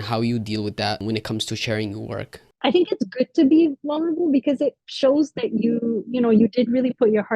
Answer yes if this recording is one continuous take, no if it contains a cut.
no